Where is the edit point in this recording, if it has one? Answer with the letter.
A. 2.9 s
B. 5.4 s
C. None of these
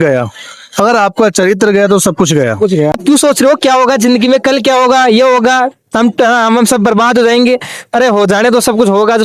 A